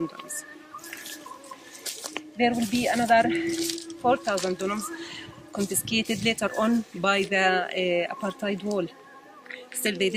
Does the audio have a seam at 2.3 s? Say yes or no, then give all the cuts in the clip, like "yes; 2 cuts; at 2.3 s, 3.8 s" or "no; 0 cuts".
no; 0 cuts